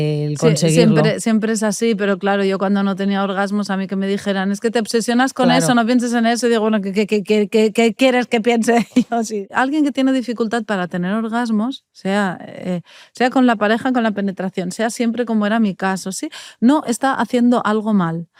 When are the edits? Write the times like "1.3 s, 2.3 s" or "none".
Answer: none